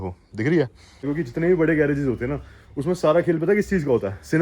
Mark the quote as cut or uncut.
cut